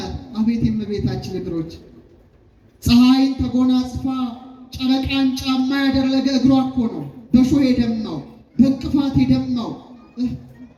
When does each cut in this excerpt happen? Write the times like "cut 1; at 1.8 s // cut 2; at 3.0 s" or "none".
none